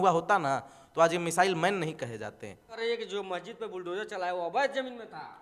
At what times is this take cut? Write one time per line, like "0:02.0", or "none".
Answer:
0:02.7